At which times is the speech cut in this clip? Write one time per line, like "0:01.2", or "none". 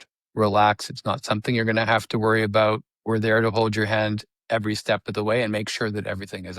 none